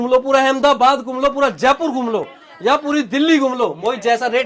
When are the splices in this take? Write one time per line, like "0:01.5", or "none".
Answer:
none

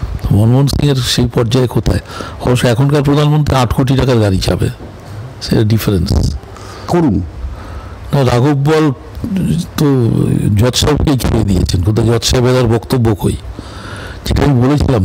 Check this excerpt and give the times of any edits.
0:06.9

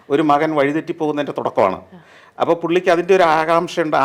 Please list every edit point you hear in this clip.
none

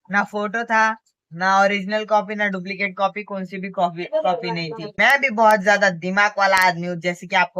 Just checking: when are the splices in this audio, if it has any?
0:04.9

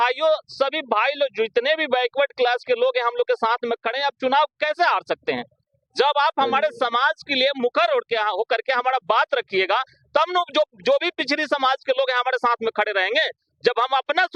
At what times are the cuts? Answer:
none

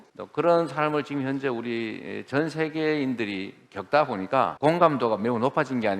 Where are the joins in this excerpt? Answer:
0:04.5

